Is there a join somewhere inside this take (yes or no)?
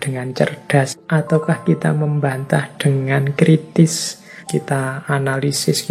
yes